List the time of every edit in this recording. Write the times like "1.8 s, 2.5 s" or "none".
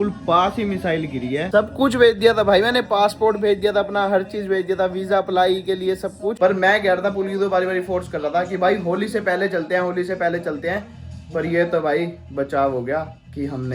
1.5 s, 6.3 s